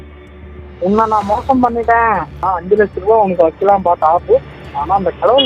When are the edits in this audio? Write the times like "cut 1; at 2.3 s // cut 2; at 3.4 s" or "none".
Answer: cut 1; at 2.4 s